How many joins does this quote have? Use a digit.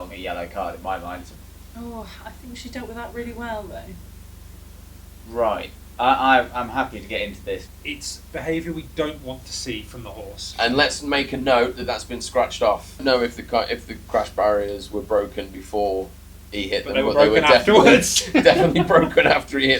4